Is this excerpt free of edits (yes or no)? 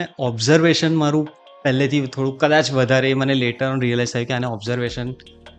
yes